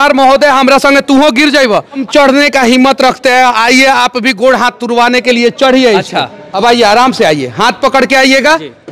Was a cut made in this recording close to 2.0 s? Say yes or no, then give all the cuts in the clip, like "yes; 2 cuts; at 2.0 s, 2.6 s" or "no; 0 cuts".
yes; 2 cuts; at 2.0 s, 6.4 s